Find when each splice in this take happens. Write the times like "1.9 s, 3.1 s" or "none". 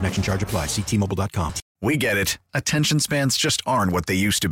1.6 s

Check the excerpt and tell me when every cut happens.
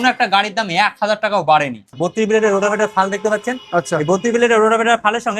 1.9 s

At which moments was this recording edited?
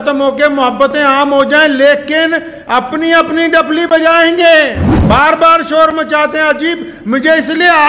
4.9 s

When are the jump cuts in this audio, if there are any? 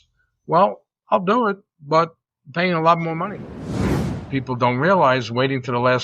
3.9 s

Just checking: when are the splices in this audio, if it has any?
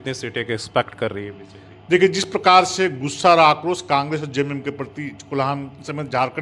none

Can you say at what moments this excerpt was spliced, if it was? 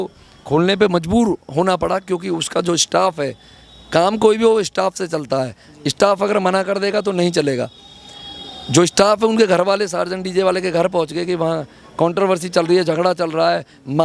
none

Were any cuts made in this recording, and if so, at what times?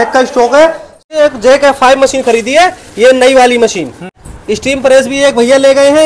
1.1 s, 4.2 s

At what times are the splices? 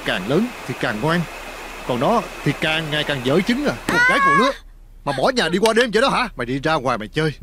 3.8 s, 6.4 s

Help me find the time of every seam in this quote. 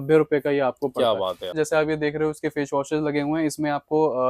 1.5 s

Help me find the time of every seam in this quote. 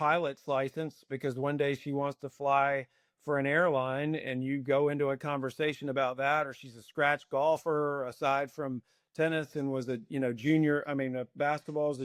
none

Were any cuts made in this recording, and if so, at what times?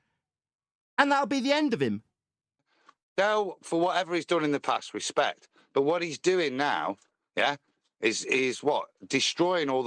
2.6 s

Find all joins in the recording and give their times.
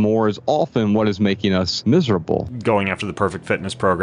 1.7 s, 2.5 s

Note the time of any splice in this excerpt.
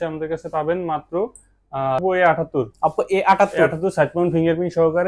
2.0 s

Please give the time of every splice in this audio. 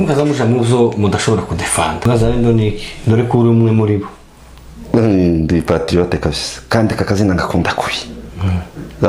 2.0 s

